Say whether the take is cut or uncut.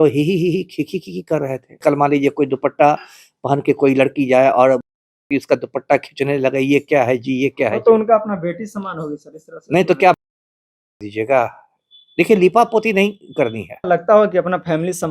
cut